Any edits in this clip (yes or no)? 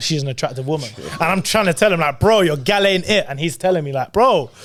no